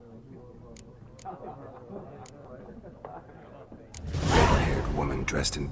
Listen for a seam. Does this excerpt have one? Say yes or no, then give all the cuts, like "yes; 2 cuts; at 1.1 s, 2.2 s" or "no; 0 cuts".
yes; 1 cut; at 1.0 s